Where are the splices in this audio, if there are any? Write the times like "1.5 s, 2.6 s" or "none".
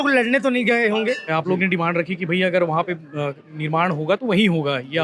1.3 s